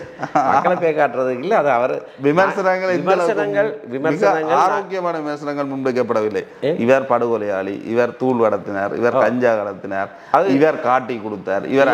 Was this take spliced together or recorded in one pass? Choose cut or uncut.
uncut